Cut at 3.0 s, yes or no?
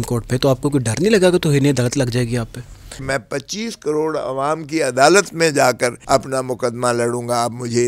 yes